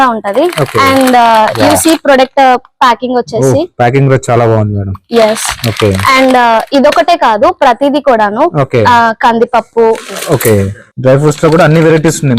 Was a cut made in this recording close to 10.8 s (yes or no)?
yes